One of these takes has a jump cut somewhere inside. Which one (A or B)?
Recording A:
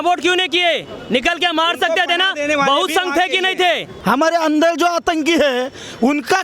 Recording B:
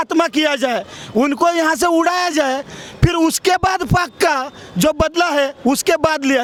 A